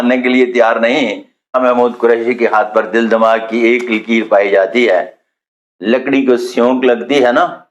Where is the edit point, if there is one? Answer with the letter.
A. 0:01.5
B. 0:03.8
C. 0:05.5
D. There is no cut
A